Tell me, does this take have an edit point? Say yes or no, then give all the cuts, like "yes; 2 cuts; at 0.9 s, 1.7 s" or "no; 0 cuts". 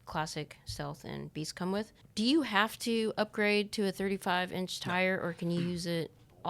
yes; 1 cut; at 2.0 s